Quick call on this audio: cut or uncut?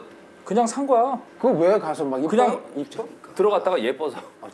uncut